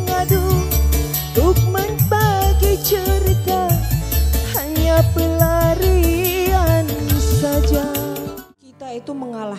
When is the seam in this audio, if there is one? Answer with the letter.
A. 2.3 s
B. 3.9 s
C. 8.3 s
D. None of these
C